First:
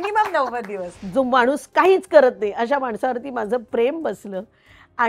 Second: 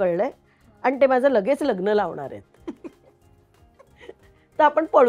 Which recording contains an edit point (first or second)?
first